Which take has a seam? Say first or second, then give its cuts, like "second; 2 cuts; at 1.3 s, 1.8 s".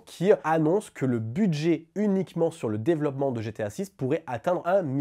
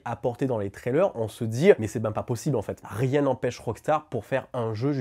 second; 1 cut; at 2.8 s